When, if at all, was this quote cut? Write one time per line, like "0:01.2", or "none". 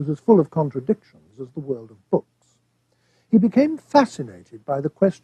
0:03.8